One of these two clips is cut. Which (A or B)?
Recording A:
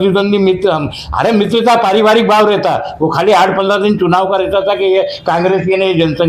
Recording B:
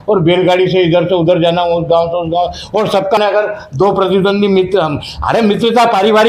B